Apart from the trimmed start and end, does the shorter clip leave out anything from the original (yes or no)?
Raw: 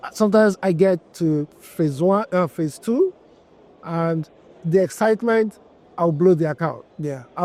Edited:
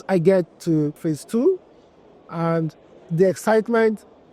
yes